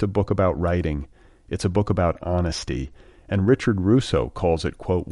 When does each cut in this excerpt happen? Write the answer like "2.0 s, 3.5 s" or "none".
none